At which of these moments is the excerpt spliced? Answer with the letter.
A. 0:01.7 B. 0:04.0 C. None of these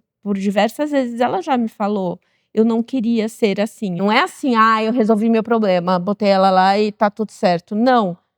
B